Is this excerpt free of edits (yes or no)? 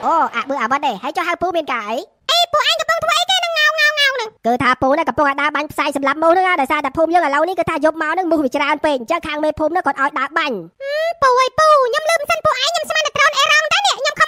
yes